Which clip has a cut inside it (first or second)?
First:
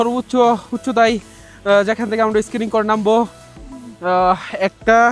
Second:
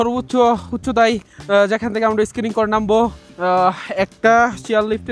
second